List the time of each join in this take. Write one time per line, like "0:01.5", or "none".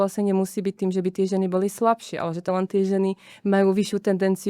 0:02.5

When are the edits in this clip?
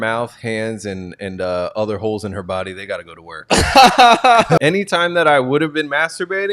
0:04.6

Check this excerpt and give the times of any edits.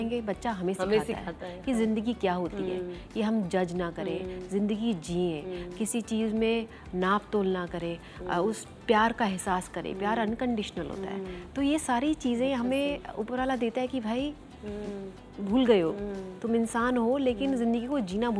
none

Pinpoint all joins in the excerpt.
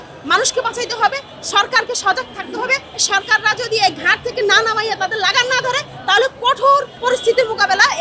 0:03.0
0:06.9

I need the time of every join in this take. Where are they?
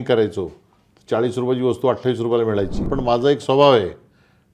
0:02.8

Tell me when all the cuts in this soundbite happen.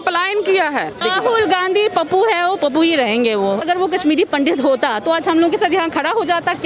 0:01.0
0:03.6

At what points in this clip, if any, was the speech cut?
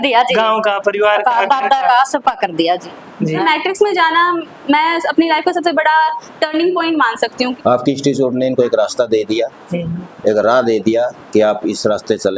0:03.4
0:07.5

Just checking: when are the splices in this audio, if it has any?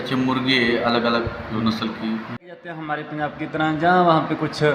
0:02.8

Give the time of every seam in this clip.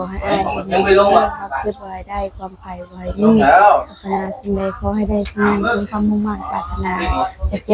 none

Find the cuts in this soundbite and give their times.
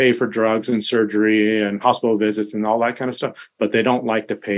none

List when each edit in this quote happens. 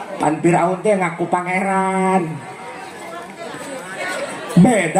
0:04.0

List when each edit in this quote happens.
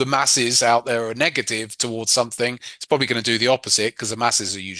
none

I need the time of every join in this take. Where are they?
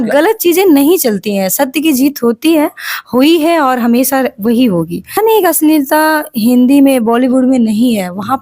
0:05.1

